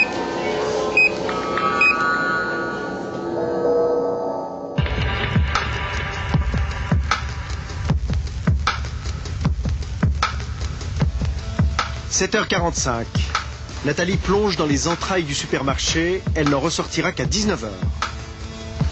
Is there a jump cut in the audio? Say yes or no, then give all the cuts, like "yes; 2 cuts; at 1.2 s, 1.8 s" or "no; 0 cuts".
no; 0 cuts